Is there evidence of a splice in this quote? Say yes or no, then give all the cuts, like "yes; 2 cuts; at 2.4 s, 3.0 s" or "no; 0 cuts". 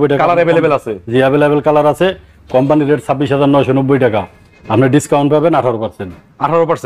no; 0 cuts